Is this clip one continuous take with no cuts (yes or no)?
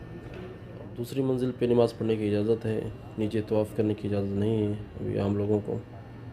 no